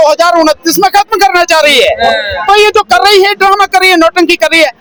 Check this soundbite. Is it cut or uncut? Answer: uncut